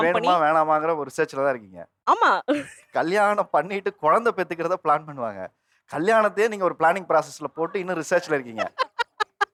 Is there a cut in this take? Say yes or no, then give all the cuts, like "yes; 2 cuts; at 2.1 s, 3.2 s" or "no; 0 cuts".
no; 0 cuts